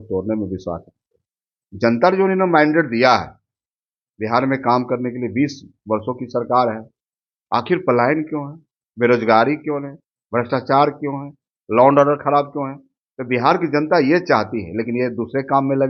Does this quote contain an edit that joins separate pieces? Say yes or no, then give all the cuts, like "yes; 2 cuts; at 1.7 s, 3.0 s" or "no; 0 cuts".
no; 0 cuts